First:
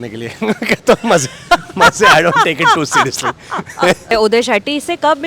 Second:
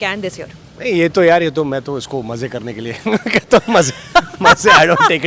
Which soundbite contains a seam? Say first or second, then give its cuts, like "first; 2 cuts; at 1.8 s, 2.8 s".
first; 1 cut; at 4.1 s